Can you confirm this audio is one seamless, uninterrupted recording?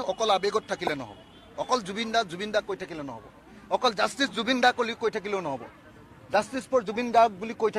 yes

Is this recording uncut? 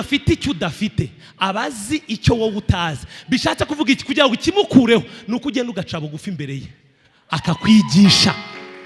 yes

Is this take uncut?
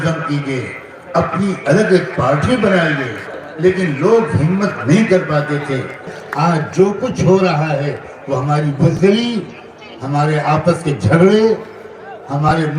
no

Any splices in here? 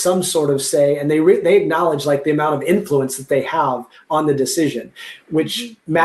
no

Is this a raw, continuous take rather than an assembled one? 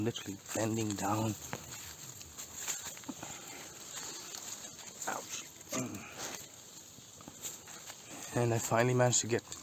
yes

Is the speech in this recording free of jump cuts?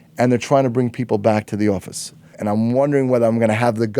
no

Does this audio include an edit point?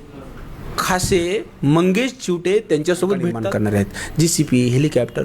yes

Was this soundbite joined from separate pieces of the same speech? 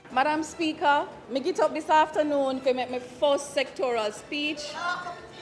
yes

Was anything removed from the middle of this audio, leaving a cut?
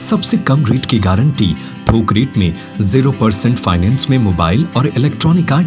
no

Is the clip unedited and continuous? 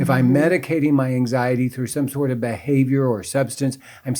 yes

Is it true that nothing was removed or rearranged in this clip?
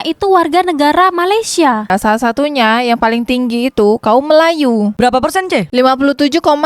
no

